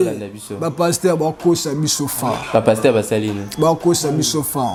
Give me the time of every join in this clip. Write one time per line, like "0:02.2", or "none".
none

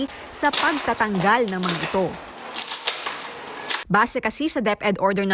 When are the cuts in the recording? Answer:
0:03.8

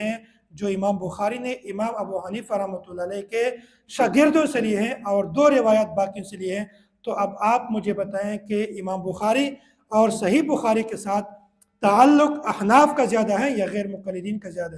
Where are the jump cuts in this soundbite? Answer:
none

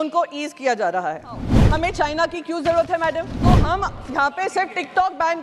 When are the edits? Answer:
0:01.5
0:03.4

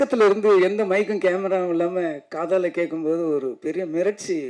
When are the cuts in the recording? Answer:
none

